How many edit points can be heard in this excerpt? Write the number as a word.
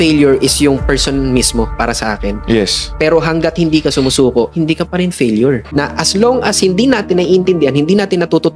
one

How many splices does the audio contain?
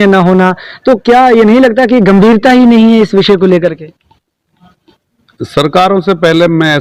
zero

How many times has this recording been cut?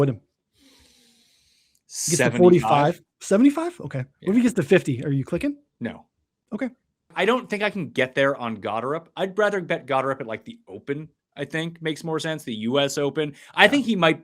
one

